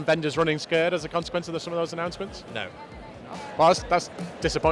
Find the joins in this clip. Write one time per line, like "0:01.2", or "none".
0:03.4